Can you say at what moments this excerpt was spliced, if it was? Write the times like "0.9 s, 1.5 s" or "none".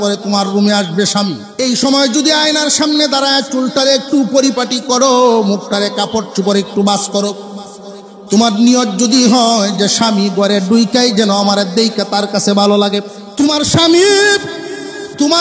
1.4 s, 13.2 s

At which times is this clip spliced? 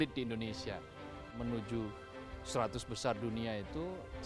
1.4 s

